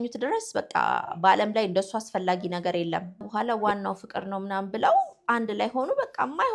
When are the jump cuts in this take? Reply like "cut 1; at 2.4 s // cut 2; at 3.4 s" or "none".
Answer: cut 1; at 3.3 s